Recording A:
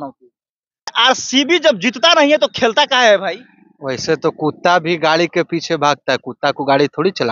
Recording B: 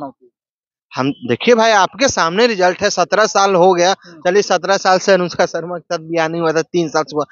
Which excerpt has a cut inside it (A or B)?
A